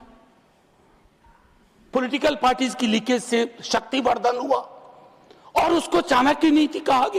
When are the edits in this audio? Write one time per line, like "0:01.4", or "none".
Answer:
none

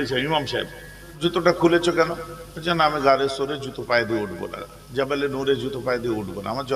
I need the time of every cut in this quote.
0:01.2

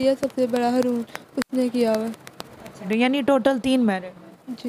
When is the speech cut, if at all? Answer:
0:02.9

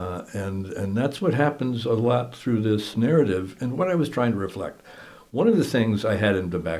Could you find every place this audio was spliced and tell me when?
0:02.9

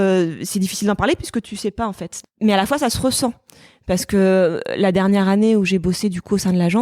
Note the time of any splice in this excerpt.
0:02.0

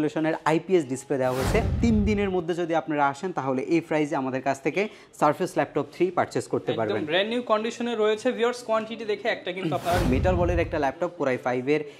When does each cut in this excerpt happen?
0:01.7
0:10.1

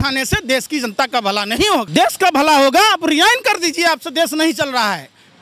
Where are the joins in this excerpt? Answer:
0:01.9

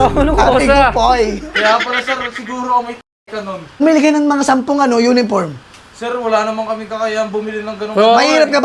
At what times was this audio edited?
0:03.8

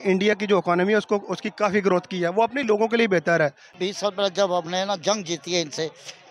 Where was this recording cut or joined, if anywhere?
0:03.7

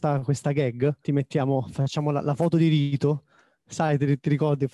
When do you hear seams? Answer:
0:01.0

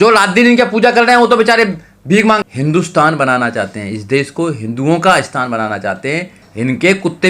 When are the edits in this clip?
0:02.4
0:06.4

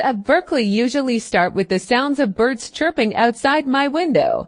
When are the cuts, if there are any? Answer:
none

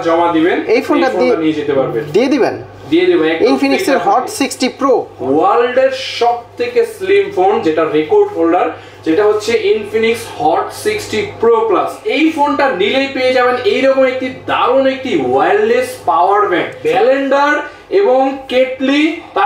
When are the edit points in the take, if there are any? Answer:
0:05.1
0:12.0
0:16.8

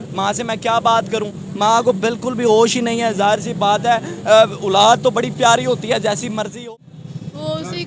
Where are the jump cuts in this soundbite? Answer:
0:06.5

